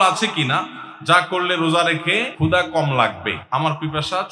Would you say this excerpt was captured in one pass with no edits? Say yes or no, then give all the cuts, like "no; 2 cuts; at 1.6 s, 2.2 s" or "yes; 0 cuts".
no; 2 cuts; at 2.3 s, 3.3 s